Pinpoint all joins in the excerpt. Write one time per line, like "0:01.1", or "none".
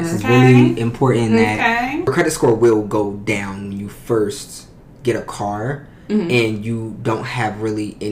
0:02.1